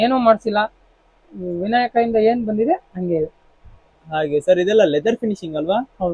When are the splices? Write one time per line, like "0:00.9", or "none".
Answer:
none